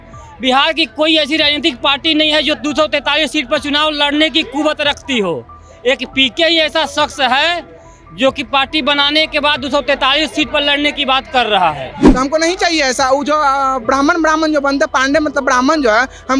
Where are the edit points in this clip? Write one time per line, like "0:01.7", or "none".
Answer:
0:12.0